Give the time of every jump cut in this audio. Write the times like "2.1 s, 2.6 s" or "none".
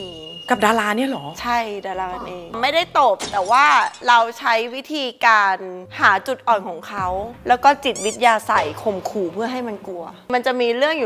none